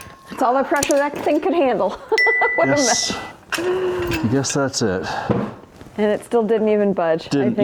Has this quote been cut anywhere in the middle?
no; 0 cuts

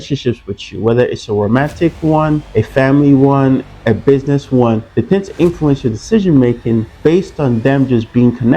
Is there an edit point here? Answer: yes; 4 cuts; at 2.5 s, 3.7 s, 4.9 s, 6.9 s

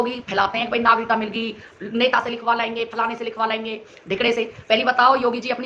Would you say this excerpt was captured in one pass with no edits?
yes; 0 cuts

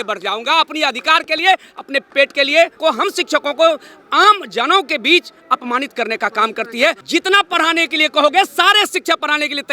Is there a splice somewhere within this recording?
yes; 2 cuts; at 2.8 s, 7.0 s

